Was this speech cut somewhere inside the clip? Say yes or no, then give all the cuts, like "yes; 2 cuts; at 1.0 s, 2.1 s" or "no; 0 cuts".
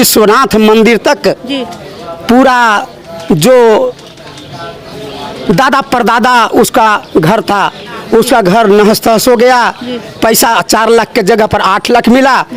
no; 0 cuts